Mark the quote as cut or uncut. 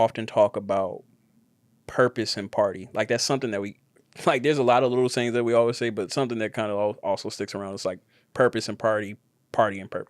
uncut